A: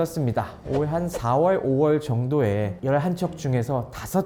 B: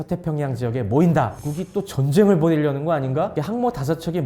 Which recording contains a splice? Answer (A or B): B